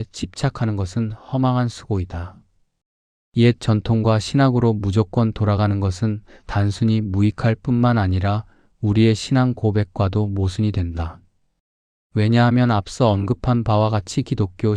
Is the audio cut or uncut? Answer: uncut